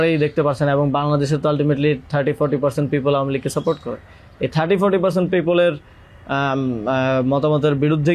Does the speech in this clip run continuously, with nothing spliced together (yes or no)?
yes